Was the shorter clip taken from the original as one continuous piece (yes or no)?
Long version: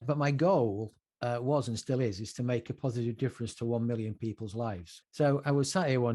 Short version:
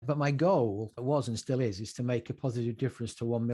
no